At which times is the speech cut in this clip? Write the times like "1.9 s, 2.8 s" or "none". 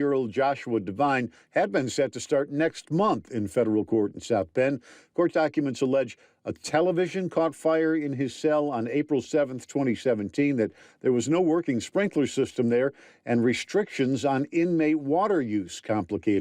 none